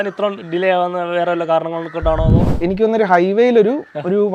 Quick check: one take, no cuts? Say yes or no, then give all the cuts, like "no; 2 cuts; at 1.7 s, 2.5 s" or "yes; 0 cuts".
no; 1 cut; at 2.6 s